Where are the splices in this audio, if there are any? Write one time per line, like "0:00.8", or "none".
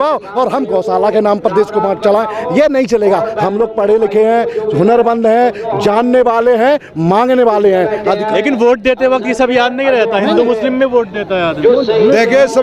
none